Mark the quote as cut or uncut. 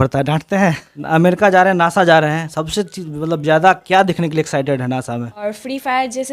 cut